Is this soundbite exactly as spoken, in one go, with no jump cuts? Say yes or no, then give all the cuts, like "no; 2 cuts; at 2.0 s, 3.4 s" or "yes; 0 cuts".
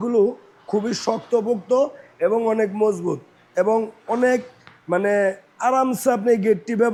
yes; 0 cuts